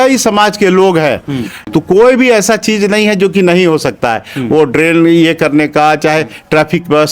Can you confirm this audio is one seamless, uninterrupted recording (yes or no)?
no